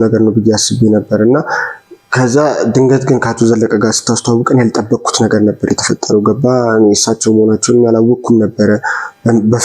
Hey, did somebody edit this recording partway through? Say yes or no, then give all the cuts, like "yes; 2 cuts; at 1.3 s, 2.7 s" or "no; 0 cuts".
no; 0 cuts